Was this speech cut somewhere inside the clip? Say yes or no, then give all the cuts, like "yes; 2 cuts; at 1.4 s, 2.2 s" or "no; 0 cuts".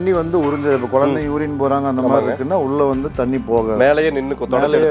no; 0 cuts